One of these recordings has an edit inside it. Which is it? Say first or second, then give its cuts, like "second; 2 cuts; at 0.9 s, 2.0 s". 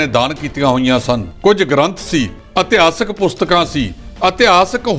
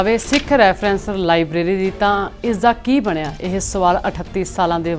first; 3 cuts; at 1.3 s, 2.4 s, 4.0 s